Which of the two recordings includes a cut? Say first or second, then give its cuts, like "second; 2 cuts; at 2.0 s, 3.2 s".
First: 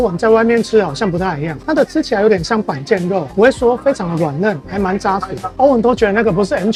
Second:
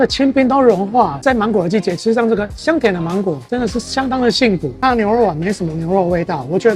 second; 2 cuts; at 1.1 s, 4.7 s